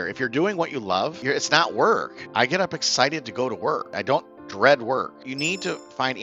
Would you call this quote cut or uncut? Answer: cut